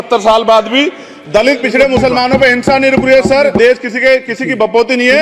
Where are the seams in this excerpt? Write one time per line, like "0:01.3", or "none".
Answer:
0:03.5